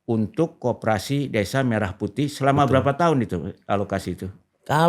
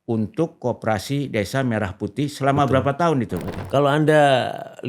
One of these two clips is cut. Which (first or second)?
second